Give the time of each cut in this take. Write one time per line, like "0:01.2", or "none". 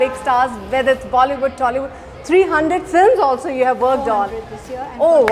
none